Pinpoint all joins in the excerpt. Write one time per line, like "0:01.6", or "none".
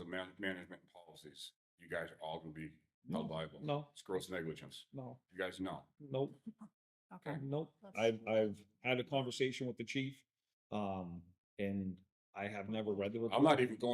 0:07.9